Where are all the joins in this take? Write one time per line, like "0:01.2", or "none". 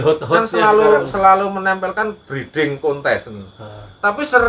none